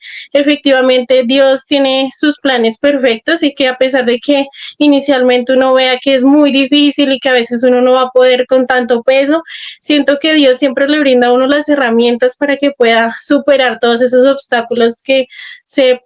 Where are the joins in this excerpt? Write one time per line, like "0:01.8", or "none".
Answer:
none